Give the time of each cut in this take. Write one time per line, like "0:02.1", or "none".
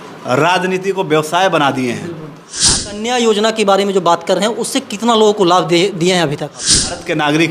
0:02.7
0:06.5